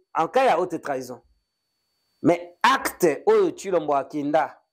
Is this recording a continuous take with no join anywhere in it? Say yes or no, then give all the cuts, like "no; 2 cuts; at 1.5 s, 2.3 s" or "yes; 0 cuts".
yes; 0 cuts